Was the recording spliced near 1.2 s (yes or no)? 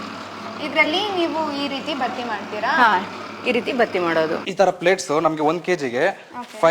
no